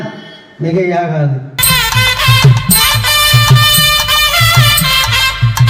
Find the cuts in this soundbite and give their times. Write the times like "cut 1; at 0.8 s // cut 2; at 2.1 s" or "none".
cut 1; at 1.6 s